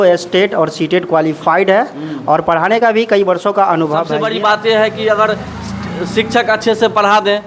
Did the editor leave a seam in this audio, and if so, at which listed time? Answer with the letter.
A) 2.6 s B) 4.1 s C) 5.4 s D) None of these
B